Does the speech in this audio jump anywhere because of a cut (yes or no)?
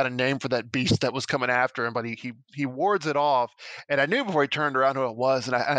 no